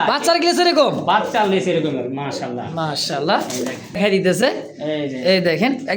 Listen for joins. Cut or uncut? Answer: cut